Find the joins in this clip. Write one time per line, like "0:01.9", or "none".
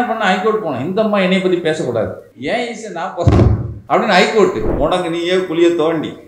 0:02.3
0:03.7
0:04.7

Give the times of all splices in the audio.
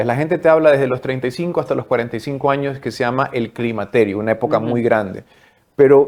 none

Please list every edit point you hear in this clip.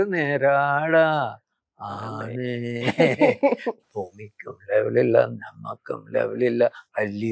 0:03.7

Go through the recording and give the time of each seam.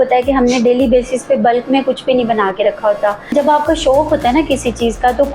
0:03.3

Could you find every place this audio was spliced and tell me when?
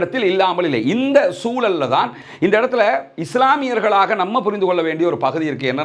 0:02.2

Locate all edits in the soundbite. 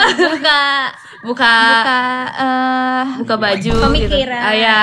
none

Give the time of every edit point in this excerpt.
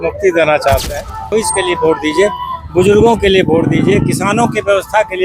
0:01.3

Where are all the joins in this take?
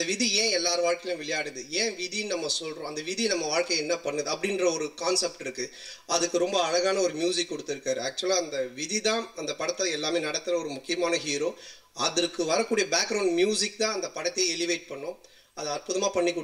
none

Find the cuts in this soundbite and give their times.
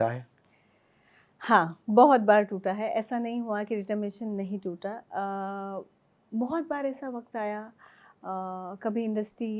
none

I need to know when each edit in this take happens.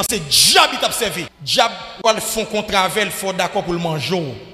0:01.4

